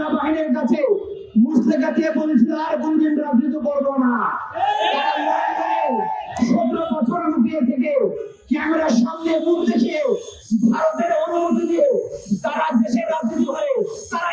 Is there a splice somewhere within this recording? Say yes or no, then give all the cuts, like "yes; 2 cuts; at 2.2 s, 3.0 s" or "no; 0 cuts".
no; 0 cuts